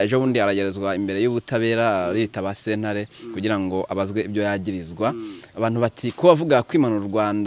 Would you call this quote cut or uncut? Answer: uncut